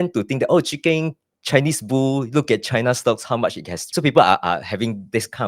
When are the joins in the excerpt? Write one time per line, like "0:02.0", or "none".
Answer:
0:03.8